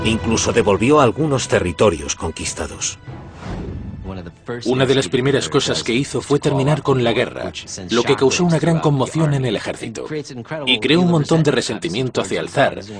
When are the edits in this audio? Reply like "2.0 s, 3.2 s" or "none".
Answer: none